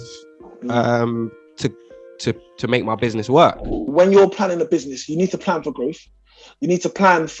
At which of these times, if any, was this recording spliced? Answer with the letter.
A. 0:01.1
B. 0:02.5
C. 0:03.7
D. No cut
C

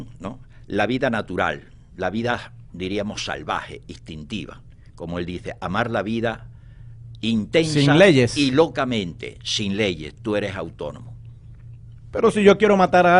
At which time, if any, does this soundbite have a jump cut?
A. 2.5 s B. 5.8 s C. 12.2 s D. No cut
D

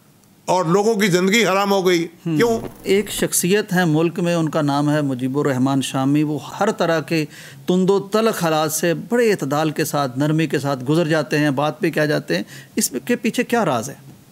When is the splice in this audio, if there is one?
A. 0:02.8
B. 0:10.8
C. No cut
A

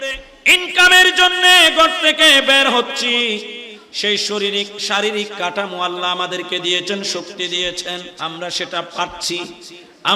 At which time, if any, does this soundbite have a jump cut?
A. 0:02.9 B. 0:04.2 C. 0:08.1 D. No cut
C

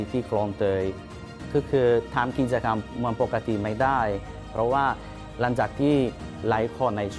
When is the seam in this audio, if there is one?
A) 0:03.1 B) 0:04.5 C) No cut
B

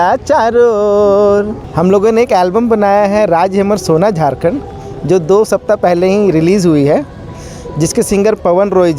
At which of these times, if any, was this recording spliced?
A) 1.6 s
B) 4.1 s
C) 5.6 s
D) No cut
A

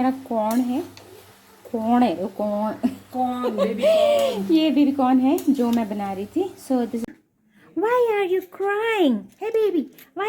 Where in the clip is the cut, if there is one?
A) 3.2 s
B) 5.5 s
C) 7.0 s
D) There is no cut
C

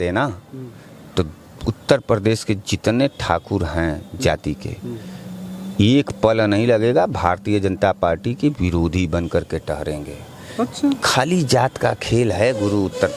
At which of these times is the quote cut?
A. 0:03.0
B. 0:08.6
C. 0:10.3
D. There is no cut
D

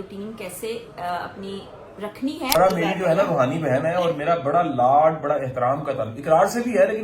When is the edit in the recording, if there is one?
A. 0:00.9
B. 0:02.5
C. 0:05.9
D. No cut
B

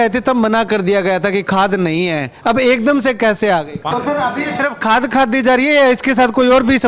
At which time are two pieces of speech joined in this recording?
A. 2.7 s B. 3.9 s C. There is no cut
B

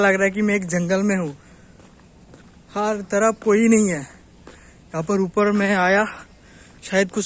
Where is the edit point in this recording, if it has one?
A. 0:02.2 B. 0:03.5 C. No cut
C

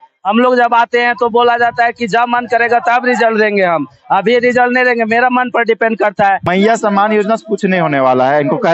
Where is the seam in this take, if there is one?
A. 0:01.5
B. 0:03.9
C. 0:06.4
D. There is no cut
C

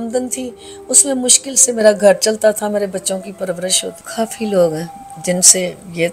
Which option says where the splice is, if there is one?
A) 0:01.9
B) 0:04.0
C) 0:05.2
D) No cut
B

